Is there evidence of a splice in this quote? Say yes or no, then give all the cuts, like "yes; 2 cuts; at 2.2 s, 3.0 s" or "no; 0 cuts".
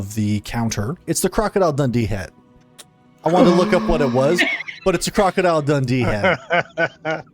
yes; 1 cut; at 1.1 s